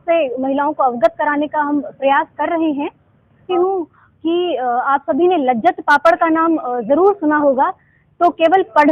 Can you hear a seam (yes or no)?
yes